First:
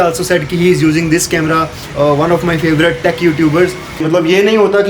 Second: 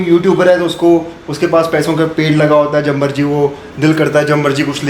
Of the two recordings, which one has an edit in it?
first; 2 cuts; at 1.8 s, 4.0 s

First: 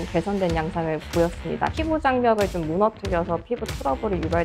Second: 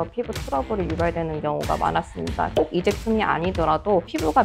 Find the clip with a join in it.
first; 1 cut; at 1.7 s

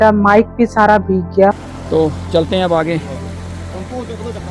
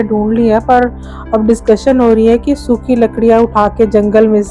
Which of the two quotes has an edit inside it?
first; 1 cut; at 1.7 s

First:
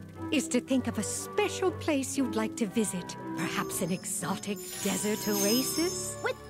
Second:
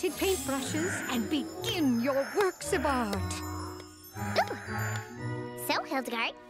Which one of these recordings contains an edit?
first; 1 cut; at 1.2 s

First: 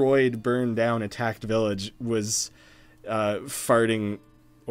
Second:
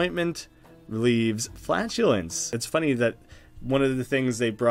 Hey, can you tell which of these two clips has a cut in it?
second; 1 cut; at 2.5 s

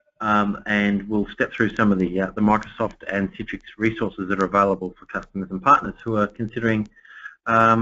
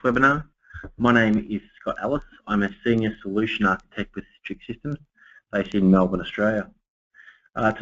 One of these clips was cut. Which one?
first; 1 cut; at 1.8 s

